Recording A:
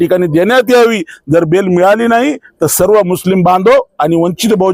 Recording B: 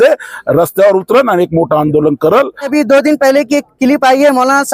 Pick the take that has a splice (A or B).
B